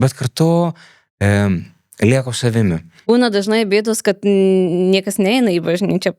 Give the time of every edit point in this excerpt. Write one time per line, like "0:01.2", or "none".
0:02.9